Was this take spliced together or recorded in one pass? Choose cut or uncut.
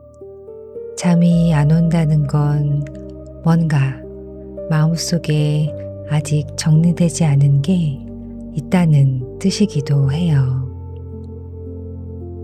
uncut